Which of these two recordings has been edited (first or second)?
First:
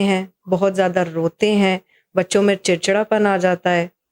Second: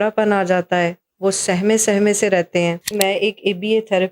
second